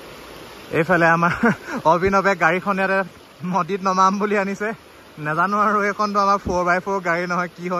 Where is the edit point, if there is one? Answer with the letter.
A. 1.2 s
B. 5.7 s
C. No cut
C